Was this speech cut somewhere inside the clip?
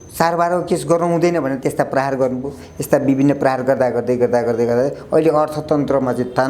no; 0 cuts

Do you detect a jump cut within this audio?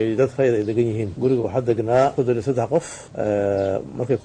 no; 0 cuts

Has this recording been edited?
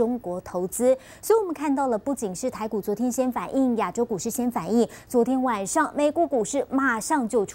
no; 0 cuts

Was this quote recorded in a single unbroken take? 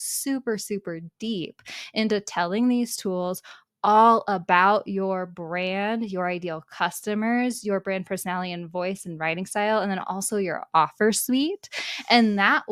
yes; 0 cuts

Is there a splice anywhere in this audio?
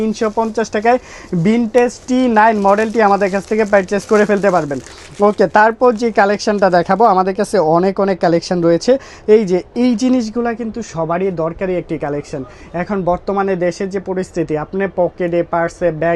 no; 0 cuts

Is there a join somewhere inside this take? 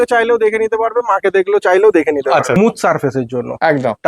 yes; 1 cut; at 2.6 s

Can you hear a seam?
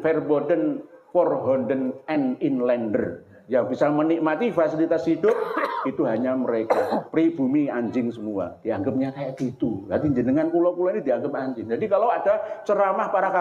no; 0 cuts

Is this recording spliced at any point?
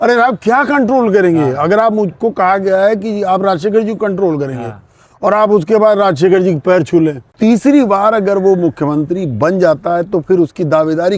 yes; 1 cut; at 7.3 s

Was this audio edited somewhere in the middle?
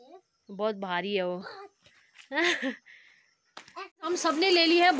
yes; 1 cut; at 3.9 s

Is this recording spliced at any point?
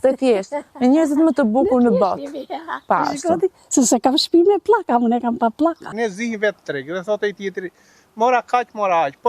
yes; 1 cut; at 5.9 s

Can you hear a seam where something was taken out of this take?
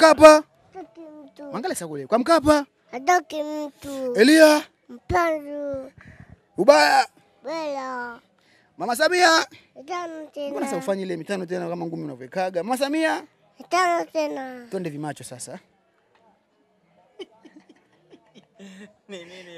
no; 0 cuts

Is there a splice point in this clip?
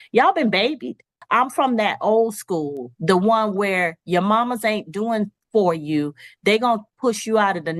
yes; 1 cut; at 1.1 s

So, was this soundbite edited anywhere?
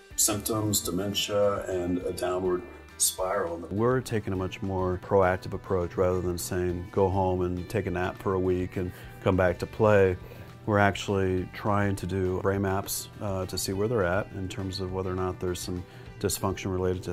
yes; 3 cuts; at 3.7 s, 5.0 s, 12.4 s

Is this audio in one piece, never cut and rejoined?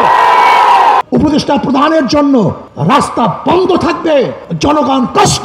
no; 3 cuts; at 1.0 s, 2.7 s, 4.4 s

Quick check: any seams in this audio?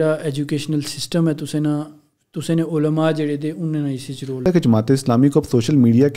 yes; 1 cut; at 4.4 s

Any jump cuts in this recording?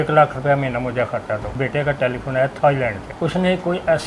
yes; 2 cuts; at 1.5 s, 3.1 s

